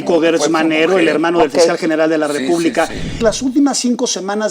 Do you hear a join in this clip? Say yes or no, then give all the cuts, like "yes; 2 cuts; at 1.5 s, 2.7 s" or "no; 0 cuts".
yes; 1 cut; at 3.1 s